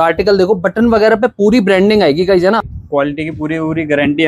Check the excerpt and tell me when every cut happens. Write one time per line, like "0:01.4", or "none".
0:02.7

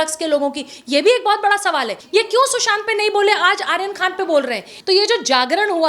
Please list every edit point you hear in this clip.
0:02.0
0:04.7

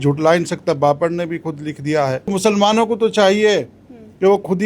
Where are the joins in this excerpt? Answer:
0:02.3

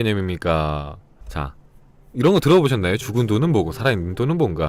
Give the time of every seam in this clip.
0:03.0

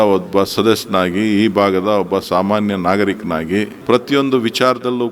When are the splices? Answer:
0:03.7

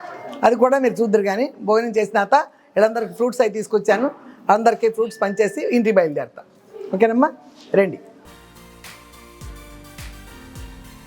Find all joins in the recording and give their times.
none

